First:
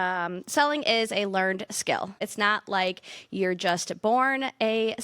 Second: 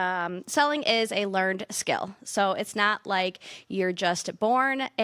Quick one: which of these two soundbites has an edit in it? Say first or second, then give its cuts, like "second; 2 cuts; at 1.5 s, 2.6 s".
first; 1 cut; at 2.3 s